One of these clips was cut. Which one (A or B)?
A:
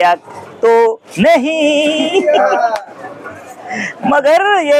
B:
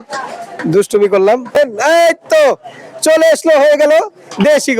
B